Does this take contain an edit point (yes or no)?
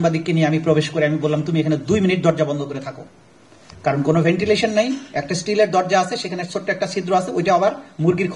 no